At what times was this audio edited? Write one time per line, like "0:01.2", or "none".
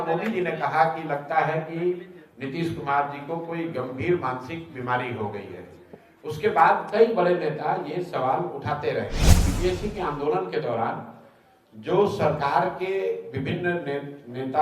0:09.5